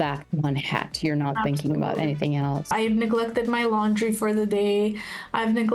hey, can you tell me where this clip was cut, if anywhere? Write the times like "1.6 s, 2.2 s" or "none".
2.7 s